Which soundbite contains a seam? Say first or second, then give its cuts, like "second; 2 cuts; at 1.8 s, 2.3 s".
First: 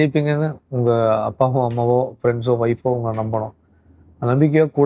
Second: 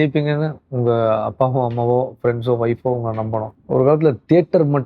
second; 1 cut; at 3.5 s